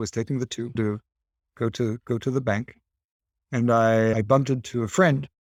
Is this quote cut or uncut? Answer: uncut